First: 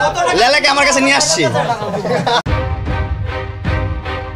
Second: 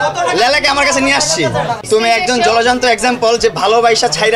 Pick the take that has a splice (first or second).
second